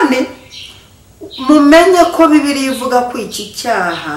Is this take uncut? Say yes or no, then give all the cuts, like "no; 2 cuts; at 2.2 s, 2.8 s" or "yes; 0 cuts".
yes; 0 cuts